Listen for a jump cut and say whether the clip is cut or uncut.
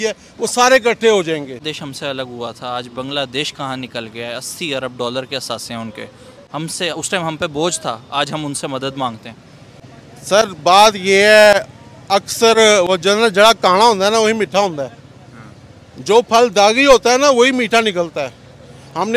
uncut